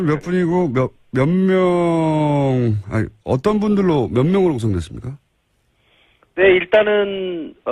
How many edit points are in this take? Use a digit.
0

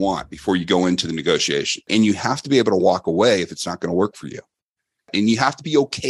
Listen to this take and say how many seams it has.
2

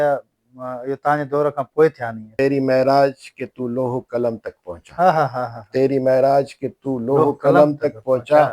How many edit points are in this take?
1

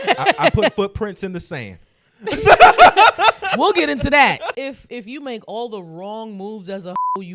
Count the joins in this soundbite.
1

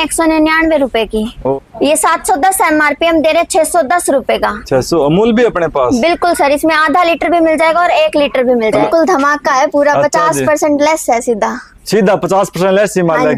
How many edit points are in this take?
2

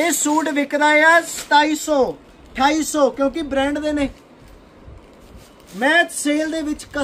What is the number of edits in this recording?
0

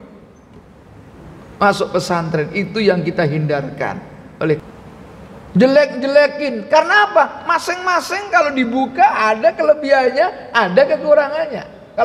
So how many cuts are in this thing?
1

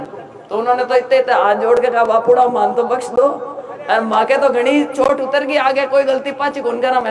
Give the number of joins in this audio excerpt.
0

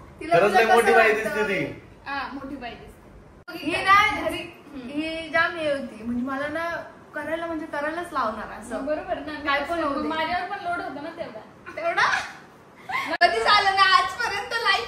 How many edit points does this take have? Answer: 2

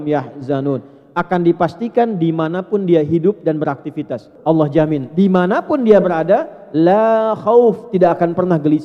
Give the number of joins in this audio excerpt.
1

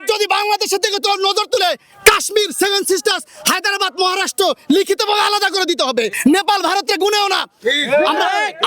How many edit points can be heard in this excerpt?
1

